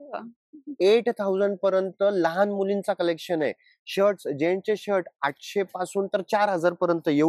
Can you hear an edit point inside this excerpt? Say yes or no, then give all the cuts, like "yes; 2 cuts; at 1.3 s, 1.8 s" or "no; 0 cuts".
no; 0 cuts